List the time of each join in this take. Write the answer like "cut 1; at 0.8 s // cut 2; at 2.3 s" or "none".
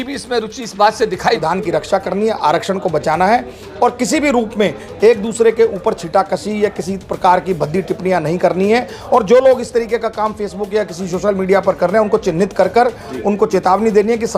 cut 1; at 1.4 s